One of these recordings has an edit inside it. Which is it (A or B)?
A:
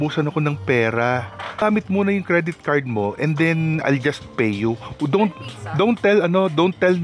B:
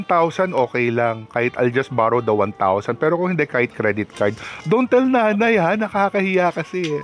A